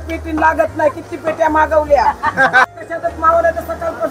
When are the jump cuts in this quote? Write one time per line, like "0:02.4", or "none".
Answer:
0:02.7